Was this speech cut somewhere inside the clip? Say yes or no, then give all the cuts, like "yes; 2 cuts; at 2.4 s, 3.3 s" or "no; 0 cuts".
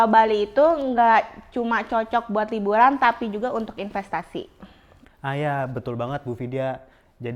no; 0 cuts